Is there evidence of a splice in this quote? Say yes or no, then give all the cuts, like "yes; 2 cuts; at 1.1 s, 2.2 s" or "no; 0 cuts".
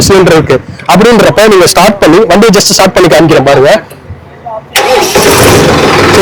no; 0 cuts